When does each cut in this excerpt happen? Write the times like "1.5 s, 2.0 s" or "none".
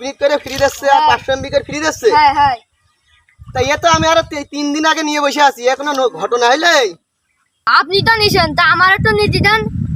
none